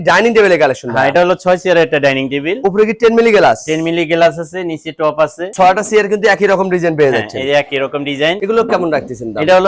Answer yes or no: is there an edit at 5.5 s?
no